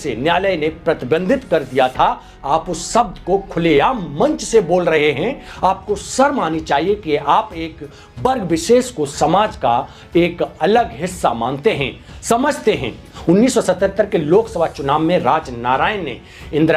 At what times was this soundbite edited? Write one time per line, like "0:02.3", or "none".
0:05.5
0:13.1